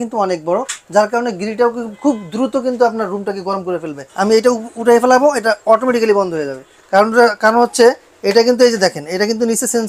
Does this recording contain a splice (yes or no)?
yes